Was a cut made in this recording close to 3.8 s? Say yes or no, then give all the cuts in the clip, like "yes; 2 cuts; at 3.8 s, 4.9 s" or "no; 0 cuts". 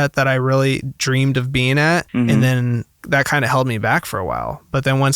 no; 1 cut; at 2.1 s